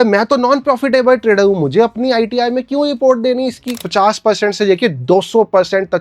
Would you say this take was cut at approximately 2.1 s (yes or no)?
no